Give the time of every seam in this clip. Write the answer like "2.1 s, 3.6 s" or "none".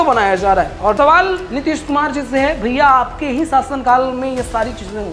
0.9 s